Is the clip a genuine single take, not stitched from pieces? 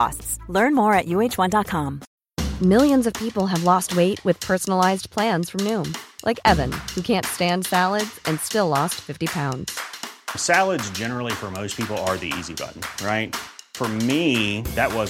no; 1 cut; at 2.0 s

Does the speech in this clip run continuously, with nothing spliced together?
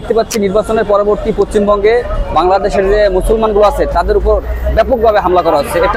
yes; 0 cuts

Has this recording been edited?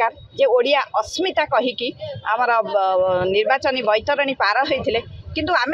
no; 0 cuts

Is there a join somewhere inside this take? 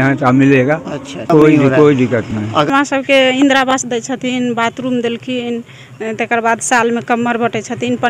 yes; 2 cuts; at 1.3 s, 2.7 s

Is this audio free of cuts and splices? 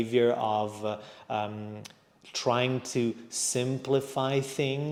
yes; 0 cuts

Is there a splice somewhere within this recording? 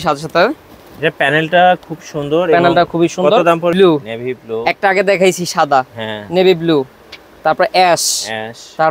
yes; 1 cut; at 3.7 s

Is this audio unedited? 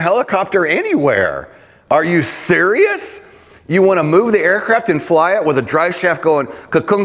yes; 0 cuts

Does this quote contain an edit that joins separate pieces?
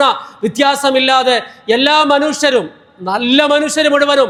no; 0 cuts

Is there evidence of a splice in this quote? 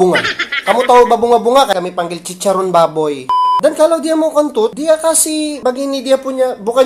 yes; 2 cuts; at 1.7 s, 3.4 s

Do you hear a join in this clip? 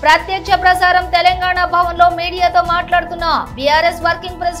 no; 0 cuts

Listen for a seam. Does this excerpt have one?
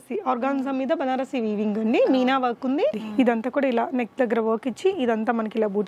yes; 1 cut; at 3.0 s

